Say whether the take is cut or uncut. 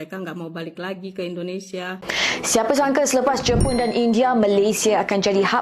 cut